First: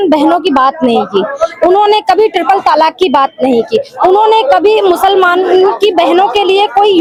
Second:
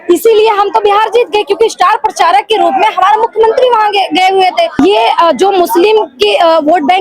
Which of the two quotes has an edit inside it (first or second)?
second